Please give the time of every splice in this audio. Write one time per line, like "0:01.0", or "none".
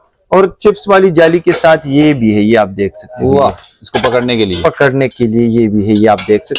none